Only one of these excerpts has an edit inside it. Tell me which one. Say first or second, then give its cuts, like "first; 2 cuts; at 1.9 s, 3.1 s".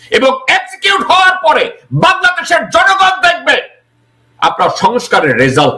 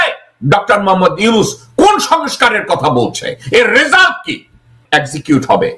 second; 1 cut; at 4.8 s